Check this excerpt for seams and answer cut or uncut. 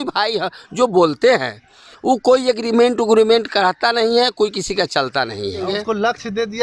cut